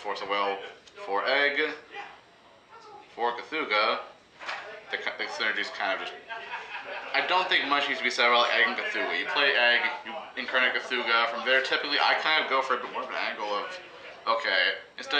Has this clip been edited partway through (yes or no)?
no